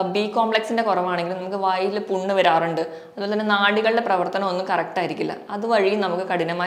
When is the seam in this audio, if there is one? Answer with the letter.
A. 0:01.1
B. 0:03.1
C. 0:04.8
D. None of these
D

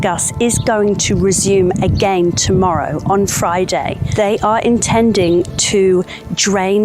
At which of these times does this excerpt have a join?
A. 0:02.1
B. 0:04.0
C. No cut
B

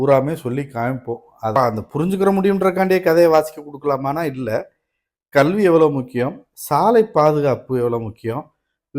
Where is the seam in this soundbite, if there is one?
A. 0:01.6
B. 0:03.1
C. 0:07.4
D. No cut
A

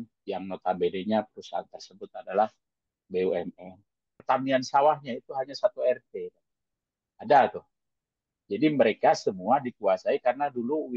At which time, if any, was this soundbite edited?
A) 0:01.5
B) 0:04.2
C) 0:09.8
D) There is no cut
B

